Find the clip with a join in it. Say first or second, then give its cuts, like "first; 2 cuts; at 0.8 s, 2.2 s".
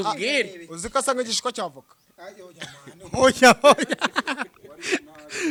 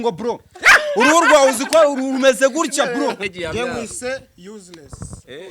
second; 1 cut; at 3.3 s